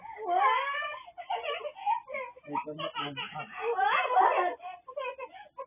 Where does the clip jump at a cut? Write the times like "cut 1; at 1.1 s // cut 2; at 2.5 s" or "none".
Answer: cut 1; at 4.2 s

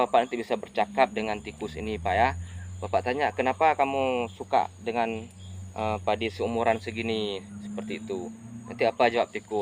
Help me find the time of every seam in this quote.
none

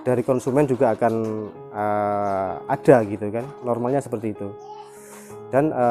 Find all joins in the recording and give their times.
cut 1; at 3.6 s

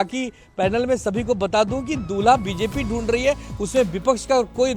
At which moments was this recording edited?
none

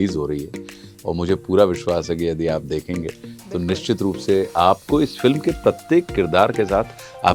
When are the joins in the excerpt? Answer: none

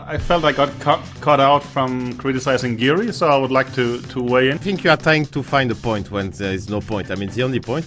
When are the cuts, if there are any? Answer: cut 1; at 4.6 s

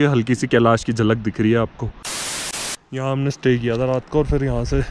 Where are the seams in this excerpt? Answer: cut 1; at 2.2 s

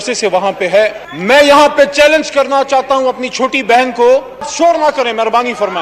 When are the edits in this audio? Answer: cut 1; at 1.1 s // cut 2; at 4.5 s

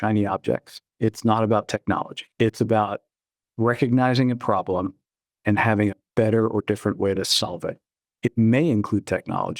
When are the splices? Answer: cut 1; at 2.2 s

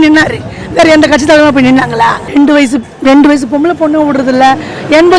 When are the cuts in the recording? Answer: cut 1; at 2.2 s

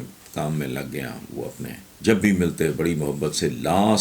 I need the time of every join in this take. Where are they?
cut 1; at 1.9 s

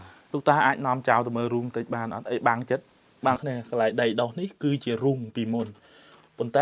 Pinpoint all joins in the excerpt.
cut 1; at 3.4 s

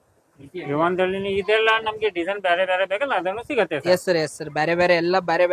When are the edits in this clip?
none

